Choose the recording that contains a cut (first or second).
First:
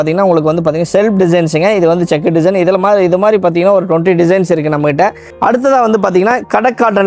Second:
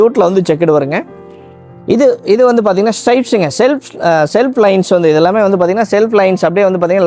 first